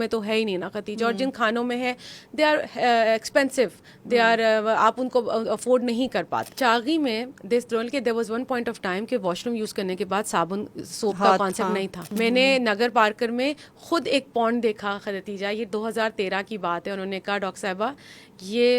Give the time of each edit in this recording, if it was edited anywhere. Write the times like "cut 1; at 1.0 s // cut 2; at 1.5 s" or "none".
cut 1; at 6.5 s // cut 2; at 12.0 s